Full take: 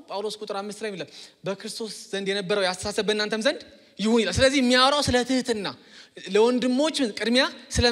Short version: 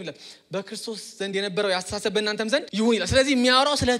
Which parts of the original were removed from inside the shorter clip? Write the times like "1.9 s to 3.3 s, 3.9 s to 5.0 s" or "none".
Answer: 3.6 s to 3.9 s